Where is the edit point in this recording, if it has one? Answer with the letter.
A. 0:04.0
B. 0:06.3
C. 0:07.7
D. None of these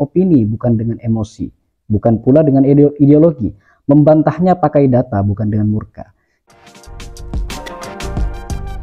B